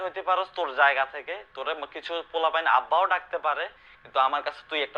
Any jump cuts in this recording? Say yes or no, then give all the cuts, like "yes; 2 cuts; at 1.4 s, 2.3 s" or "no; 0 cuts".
no; 0 cuts